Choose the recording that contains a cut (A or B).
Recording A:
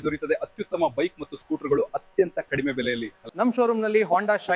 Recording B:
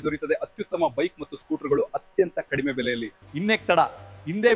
B